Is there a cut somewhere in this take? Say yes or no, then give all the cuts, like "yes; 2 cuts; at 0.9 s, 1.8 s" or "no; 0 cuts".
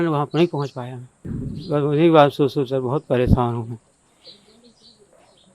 yes; 1 cut; at 1.5 s